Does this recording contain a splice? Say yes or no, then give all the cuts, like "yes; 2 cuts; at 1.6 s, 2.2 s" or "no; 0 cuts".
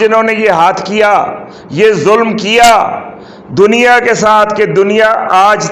no; 0 cuts